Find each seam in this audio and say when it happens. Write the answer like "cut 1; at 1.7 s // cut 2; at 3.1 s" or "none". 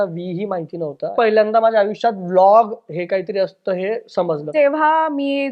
cut 1; at 1.1 s // cut 2; at 4.5 s